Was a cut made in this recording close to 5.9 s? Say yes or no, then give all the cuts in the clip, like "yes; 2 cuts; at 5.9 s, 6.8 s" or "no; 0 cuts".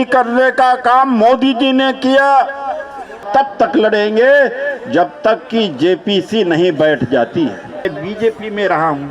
no; 2 cuts; at 3.2 s, 7.8 s